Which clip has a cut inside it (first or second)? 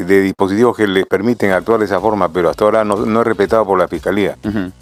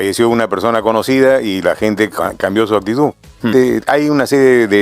second